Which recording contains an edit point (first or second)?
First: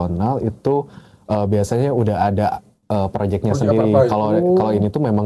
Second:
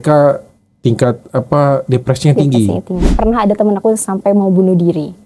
second